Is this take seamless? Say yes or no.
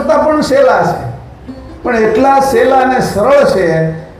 yes